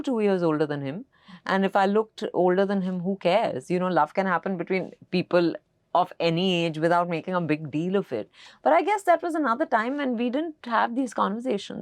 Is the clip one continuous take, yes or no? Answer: yes